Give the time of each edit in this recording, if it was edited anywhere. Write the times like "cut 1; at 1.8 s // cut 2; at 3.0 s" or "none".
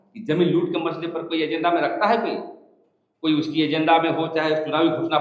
none